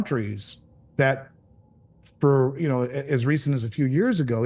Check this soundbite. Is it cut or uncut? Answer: uncut